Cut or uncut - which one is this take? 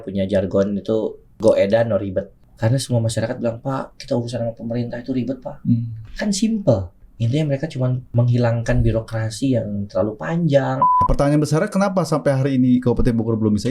cut